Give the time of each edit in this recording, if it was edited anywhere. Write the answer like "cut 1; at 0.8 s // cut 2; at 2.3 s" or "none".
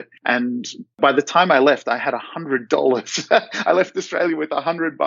none